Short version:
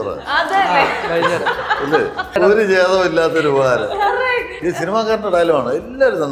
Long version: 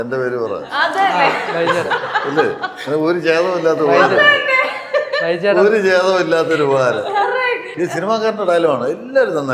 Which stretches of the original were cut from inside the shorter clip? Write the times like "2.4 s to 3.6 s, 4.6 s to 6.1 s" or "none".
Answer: 2.8 s to 5.5 s